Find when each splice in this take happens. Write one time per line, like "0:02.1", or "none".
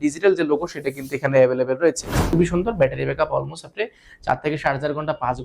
0:02.1